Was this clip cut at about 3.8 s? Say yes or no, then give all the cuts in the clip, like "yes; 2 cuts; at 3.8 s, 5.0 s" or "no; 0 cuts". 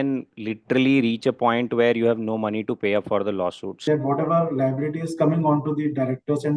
yes; 1 cut; at 3.8 s